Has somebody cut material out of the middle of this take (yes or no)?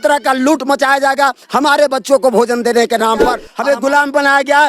yes